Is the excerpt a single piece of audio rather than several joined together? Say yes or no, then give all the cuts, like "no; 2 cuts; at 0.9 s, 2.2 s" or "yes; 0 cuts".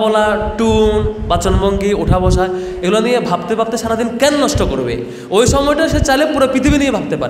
yes; 0 cuts